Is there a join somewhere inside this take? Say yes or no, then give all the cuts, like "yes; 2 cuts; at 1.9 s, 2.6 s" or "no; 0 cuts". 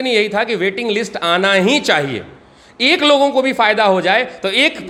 no; 0 cuts